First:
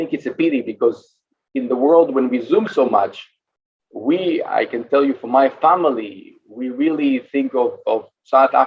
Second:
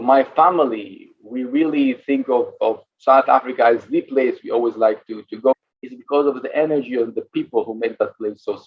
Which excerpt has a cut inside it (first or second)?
second